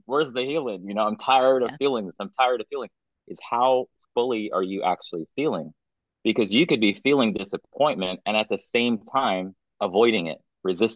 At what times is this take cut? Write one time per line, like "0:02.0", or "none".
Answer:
0:09.6